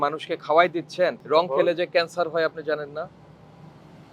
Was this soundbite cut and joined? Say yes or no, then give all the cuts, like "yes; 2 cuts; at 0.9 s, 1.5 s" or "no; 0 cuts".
no; 0 cuts